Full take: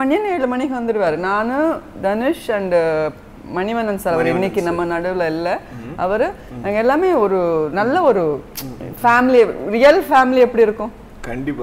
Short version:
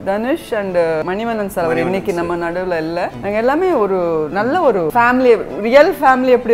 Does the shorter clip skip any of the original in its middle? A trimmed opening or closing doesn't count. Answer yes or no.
yes